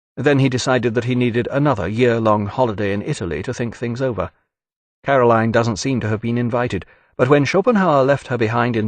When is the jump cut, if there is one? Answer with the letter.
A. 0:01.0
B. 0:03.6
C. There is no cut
B